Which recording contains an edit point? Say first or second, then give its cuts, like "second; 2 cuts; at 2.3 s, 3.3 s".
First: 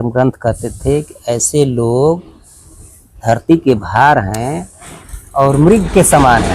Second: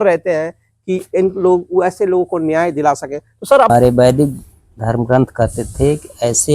second; 1 cut; at 3.7 s